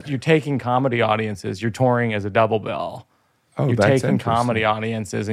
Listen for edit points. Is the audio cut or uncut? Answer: uncut